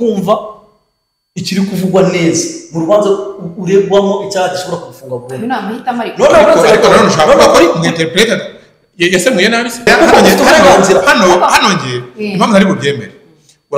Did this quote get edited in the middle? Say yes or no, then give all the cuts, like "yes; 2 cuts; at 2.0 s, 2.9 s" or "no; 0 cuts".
yes; 1 cut; at 9.9 s